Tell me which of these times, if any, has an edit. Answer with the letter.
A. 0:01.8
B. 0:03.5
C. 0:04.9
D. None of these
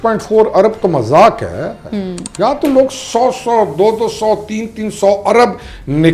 D